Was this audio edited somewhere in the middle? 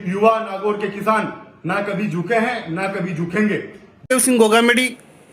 yes; 1 cut; at 4.1 s

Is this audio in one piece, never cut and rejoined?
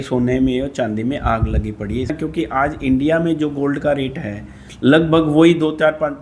no; 1 cut; at 2.1 s

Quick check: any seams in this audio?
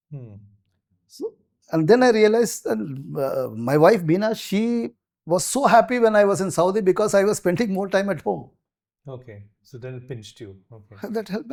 no; 0 cuts

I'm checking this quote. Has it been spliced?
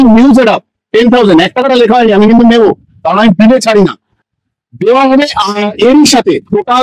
no; 0 cuts

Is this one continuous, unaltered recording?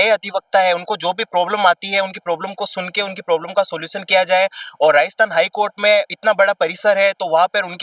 yes; 0 cuts

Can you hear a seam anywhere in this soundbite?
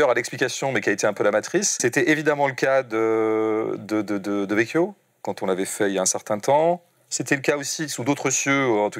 yes; 1 cut; at 1.8 s

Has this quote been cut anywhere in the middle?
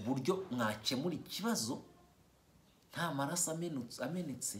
no; 0 cuts

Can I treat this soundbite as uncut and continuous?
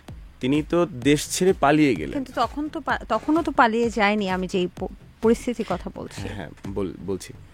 yes; 0 cuts

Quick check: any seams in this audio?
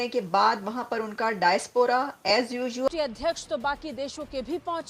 yes; 1 cut; at 2.9 s

